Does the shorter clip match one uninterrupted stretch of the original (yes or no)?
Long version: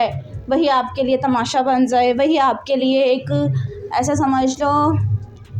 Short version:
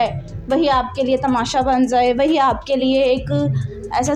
yes